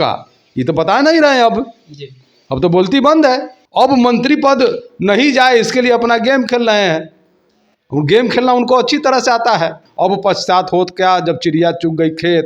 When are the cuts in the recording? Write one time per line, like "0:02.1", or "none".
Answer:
0:03.6
0:09.8